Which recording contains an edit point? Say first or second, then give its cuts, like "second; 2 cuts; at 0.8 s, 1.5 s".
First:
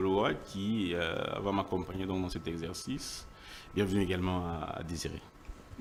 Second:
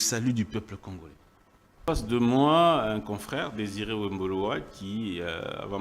second; 1 cut; at 1.8 s